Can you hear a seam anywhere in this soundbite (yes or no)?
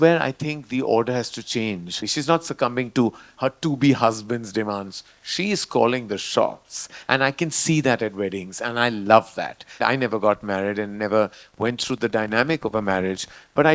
yes